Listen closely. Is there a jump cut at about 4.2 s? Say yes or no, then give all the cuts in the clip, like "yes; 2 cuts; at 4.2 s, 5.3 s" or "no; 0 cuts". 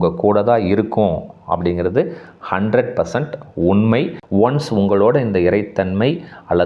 yes; 1 cut; at 4.2 s